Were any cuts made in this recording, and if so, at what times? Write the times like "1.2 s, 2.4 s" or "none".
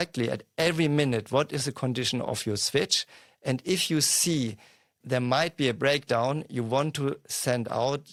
none